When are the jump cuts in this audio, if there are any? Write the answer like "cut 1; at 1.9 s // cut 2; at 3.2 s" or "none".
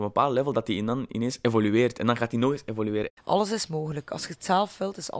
cut 1; at 3.2 s